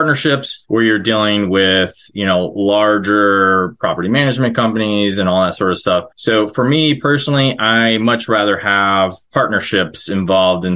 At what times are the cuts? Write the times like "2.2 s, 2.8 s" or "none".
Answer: none